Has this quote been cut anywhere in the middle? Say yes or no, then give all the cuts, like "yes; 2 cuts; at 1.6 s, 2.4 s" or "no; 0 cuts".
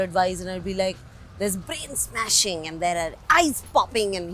no; 0 cuts